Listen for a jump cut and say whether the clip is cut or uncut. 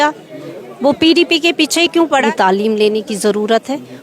cut